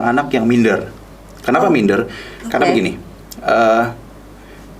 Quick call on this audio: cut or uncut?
uncut